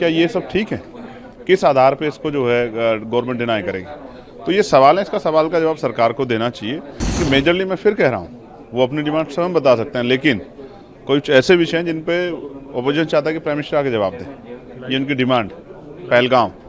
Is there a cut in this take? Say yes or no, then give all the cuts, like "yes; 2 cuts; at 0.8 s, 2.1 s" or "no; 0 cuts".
yes; 1 cut; at 7.0 s